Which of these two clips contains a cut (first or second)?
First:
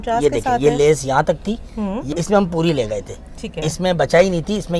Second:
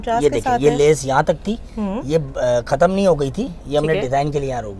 first